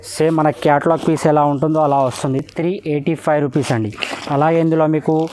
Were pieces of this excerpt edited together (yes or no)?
no